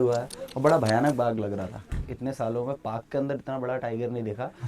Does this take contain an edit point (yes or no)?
yes